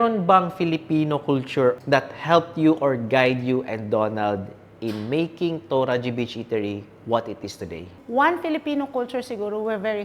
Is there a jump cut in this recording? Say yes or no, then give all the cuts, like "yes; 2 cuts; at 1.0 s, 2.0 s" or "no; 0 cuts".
yes; 1 cut; at 1.8 s